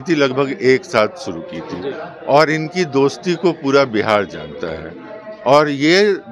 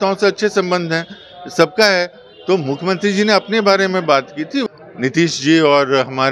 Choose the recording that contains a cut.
second; 1 cut; at 4.6 s

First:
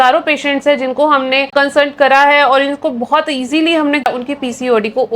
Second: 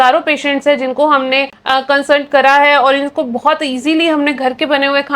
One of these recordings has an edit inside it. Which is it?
first; 2 cuts; at 1.5 s, 4.1 s

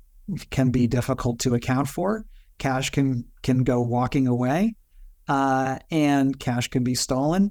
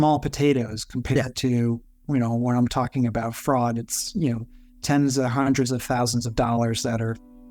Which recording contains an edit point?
second; 1 cut; at 2.0 s

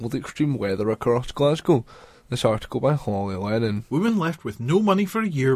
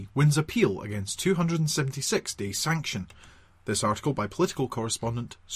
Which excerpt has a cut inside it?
first; 1 cut; at 3.8 s

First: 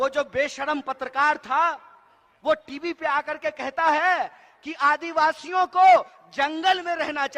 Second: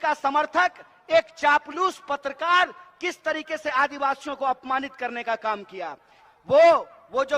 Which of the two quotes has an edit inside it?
second; 1 cut; at 6.2 s

